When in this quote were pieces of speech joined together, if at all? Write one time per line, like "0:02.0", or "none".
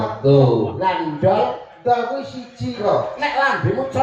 0:02.8